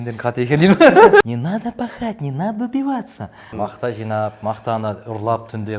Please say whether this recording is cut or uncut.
cut